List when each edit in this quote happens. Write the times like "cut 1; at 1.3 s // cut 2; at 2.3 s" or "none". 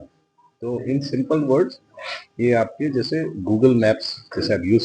none